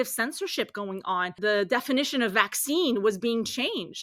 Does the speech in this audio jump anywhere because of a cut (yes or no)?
yes